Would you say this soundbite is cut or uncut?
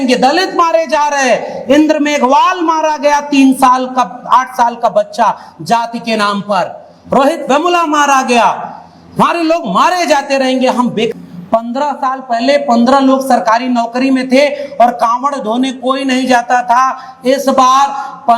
cut